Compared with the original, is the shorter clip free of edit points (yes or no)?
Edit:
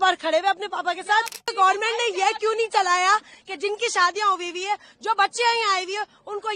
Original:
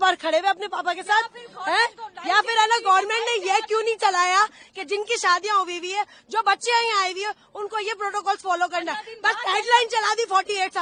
no